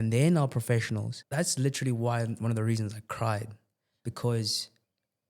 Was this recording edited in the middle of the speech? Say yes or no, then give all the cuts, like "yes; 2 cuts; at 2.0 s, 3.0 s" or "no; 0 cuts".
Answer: yes; 1 cut; at 1.2 s